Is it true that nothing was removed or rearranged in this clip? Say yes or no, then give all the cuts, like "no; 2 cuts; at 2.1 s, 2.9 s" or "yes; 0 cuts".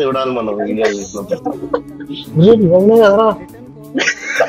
no; 1 cut; at 2.3 s